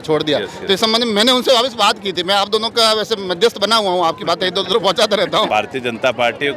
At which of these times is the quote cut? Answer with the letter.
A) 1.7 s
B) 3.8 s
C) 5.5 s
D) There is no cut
C